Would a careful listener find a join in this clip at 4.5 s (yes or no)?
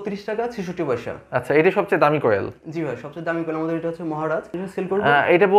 yes